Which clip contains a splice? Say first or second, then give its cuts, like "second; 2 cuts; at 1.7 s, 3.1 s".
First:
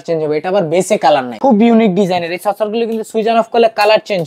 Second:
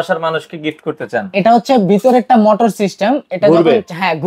first; 1 cut; at 1.3 s